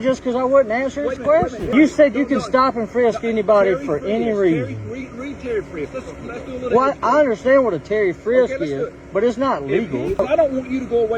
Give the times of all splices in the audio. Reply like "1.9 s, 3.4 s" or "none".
1.6 s, 10.2 s